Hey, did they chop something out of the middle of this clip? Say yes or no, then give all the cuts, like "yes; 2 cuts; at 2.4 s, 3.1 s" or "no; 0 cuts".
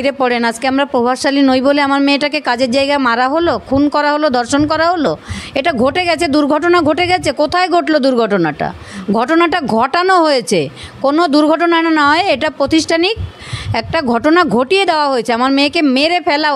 no; 0 cuts